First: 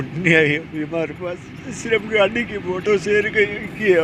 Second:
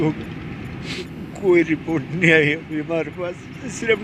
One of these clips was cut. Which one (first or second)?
second